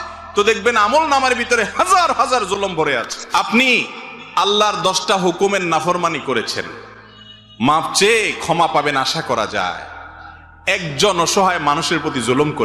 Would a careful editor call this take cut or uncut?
cut